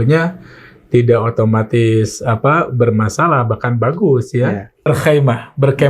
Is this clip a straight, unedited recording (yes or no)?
no